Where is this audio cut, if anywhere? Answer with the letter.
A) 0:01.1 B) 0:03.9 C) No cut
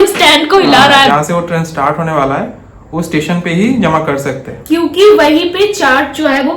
A